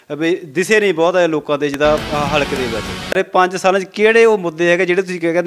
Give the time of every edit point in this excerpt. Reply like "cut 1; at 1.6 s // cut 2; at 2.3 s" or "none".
cut 1; at 3.2 s